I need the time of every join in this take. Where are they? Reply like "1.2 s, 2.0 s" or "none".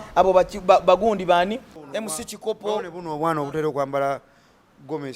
1.7 s

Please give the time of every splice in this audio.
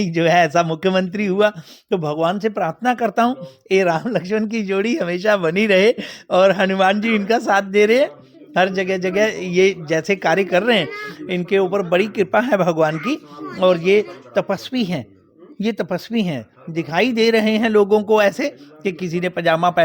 none

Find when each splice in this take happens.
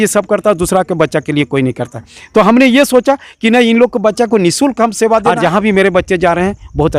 5.3 s

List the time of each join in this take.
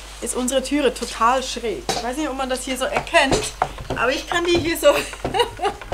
none

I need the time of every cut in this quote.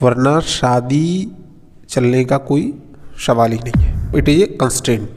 4.1 s

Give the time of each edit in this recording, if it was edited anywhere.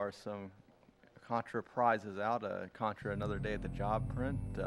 3.6 s

